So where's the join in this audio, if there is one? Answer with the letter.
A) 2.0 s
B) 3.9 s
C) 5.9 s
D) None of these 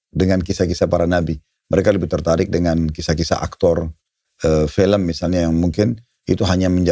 D